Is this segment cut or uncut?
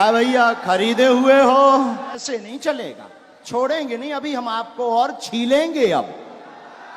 cut